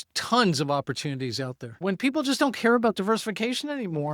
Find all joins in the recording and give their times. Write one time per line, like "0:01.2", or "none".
0:01.8

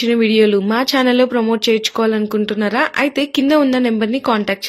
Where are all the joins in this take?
none

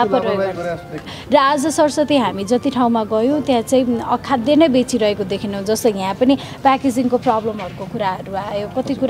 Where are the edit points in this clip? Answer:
0:01.2

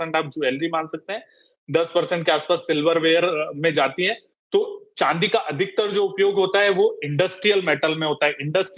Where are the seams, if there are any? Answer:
none

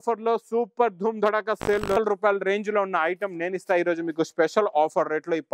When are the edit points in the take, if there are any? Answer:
0:02.0

